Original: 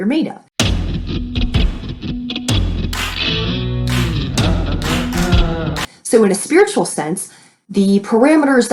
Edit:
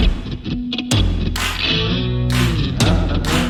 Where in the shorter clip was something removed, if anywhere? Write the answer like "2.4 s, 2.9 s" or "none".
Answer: none